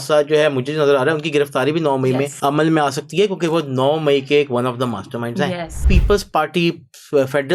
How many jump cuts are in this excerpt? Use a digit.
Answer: 2